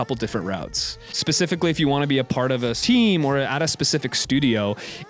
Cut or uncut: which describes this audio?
cut